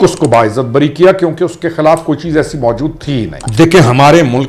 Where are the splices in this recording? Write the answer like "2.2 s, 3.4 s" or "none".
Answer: 3.4 s